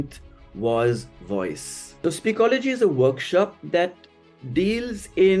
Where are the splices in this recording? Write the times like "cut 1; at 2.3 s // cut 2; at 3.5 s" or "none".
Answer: cut 1; at 1.9 s